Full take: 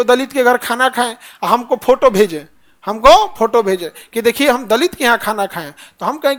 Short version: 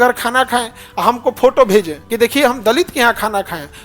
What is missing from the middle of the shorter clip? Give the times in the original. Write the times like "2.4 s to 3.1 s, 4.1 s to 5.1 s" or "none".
2.5 s to 4.0 s